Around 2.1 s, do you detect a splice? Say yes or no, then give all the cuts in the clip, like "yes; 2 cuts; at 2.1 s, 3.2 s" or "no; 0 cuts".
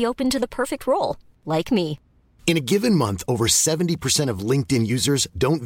no; 0 cuts